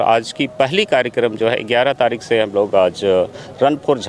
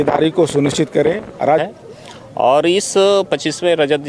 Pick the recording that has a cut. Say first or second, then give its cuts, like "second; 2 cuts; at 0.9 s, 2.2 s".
second; 1 cut; at 1.6 s